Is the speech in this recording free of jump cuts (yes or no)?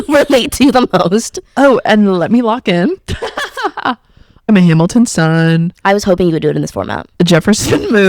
no